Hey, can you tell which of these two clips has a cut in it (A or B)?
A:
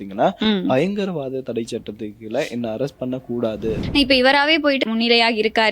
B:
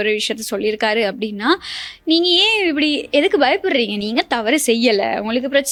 A